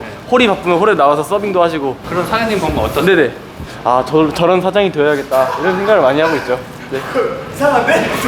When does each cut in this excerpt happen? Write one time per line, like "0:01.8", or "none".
0:03.6